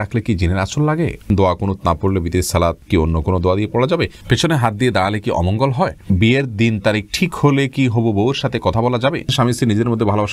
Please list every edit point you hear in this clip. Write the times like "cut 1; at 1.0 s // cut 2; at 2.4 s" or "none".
cut 1; at 1.3 s // cut 2; at 2.8 s // cut 3; at 4.2 s // cut 4; at 6.1 s // cut 5; at 9.3 s